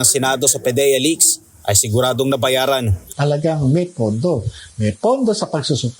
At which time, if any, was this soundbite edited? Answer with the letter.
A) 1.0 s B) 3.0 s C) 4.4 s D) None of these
B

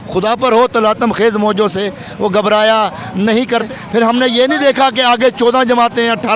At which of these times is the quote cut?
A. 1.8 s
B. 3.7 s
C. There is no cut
B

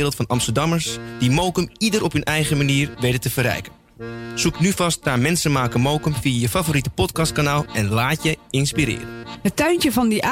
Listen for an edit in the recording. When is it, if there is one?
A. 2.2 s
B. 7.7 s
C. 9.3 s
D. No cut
C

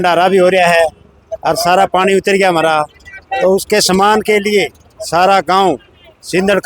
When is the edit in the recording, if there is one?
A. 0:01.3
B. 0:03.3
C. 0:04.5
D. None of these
D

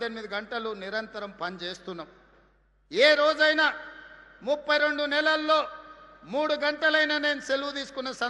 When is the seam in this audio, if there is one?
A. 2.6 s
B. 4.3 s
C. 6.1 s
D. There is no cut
D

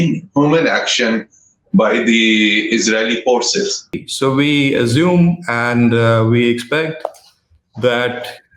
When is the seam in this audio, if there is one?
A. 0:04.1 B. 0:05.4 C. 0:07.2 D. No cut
A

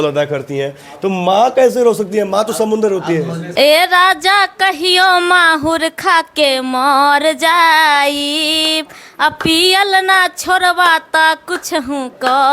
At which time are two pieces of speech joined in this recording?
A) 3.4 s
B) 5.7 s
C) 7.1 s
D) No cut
A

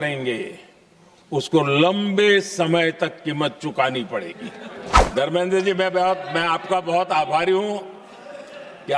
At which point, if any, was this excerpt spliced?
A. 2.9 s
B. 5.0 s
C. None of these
B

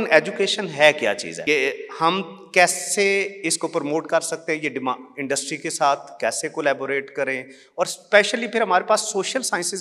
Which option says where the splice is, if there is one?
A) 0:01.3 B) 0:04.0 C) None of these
A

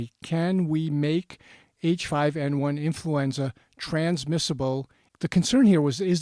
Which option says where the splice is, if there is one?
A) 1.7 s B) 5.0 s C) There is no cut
B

